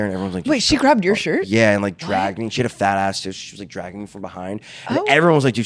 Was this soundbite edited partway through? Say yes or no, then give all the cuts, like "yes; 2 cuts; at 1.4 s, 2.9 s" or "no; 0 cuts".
no; 0 cuts